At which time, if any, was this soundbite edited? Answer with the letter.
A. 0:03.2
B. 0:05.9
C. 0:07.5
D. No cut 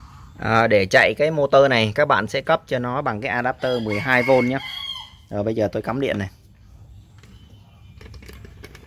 D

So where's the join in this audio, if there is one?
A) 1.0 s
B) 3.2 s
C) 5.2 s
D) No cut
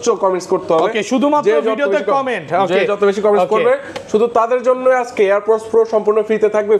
D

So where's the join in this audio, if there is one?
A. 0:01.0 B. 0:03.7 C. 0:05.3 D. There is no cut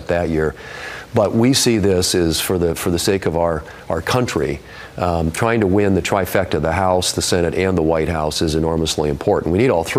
D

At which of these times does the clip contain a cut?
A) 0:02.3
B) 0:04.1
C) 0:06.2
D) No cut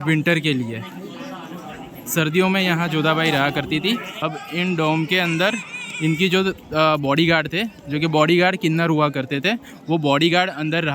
B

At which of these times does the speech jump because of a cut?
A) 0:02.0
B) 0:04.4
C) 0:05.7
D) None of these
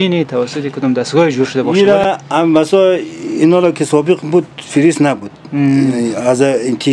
D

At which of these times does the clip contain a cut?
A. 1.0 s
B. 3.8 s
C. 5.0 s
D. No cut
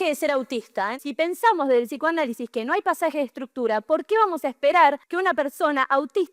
A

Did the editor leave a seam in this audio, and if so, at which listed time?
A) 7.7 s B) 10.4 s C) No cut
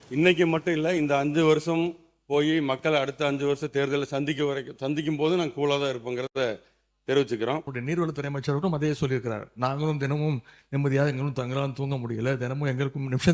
A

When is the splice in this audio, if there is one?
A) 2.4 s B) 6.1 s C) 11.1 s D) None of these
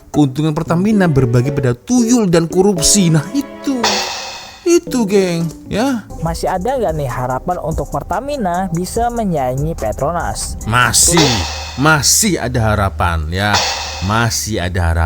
B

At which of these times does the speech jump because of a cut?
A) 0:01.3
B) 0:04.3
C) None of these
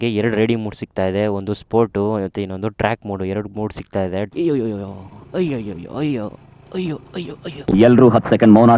B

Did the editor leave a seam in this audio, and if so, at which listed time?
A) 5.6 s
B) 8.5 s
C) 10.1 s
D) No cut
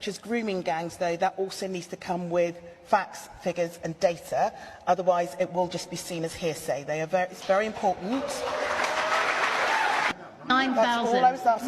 C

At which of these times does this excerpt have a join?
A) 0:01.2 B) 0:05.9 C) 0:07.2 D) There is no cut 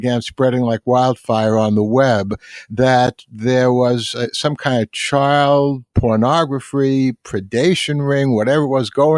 B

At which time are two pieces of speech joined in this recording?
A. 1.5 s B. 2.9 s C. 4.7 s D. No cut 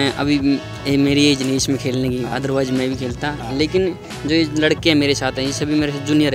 D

